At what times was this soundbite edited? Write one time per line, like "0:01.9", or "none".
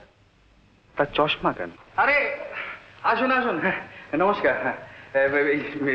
0:01.8